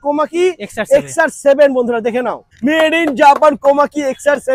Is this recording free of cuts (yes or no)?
yes